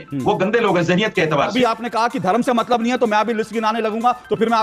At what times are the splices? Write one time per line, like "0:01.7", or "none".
0:01.5